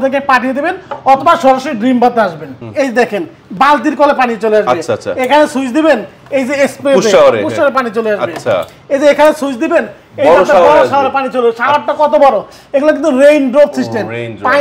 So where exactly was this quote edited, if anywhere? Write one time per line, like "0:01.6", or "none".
0:02.5